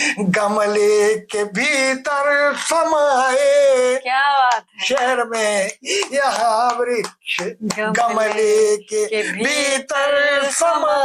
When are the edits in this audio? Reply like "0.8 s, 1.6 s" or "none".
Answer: none